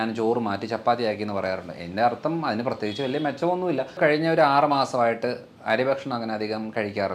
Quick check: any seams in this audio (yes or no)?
yes